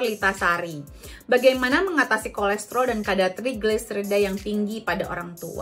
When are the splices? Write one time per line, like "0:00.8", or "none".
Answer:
none